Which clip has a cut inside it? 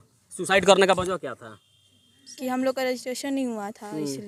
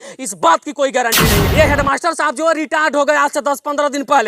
second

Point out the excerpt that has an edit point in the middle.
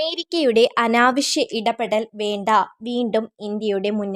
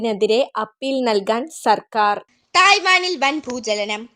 second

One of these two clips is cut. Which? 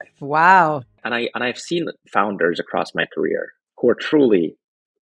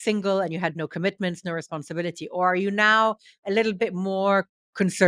first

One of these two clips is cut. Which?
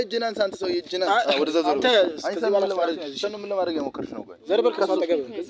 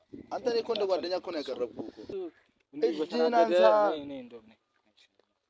second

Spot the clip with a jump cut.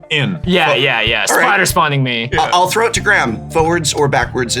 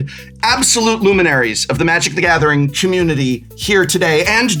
first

